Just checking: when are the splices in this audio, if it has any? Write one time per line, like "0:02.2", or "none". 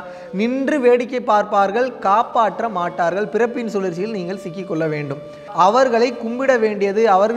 0:05.4

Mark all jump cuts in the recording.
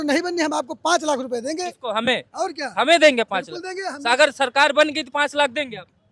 none

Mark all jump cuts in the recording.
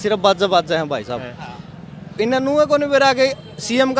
none

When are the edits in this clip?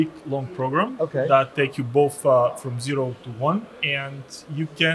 0:01.5
0:03.8

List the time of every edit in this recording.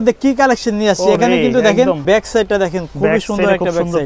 0:02.0

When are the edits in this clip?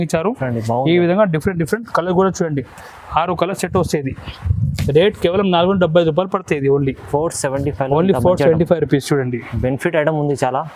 none

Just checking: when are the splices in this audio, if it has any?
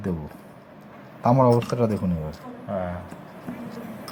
none

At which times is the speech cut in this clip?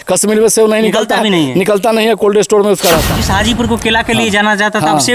0:03.2

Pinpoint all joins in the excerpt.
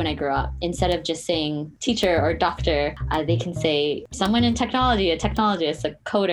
0:01.7
0:03.0
0:04.1

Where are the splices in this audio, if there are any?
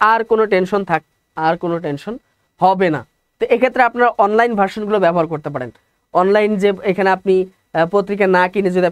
none

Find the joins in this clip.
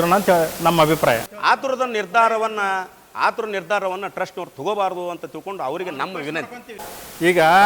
0:01.3
0:06.8

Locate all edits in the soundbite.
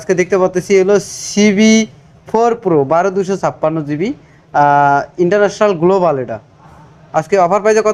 none

